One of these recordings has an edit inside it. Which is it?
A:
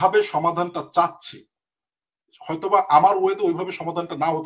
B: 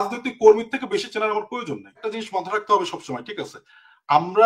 B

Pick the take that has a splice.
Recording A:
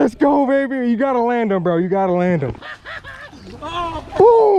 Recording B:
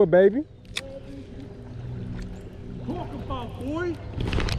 A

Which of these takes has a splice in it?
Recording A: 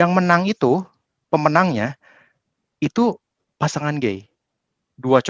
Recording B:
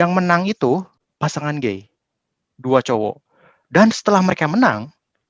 B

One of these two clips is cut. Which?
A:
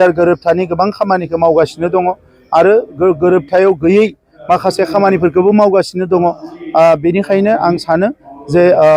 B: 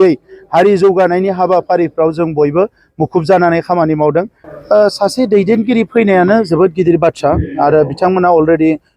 B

